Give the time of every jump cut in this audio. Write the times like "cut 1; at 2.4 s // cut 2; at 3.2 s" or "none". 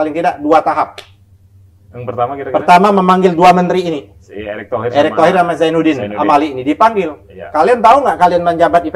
none